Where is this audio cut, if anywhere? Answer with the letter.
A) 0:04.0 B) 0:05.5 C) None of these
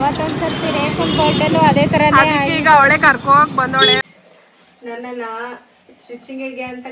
A